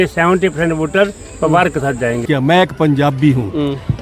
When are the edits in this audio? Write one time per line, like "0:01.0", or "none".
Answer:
0:02.2